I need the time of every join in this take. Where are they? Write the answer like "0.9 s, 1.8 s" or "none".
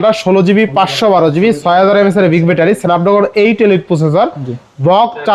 none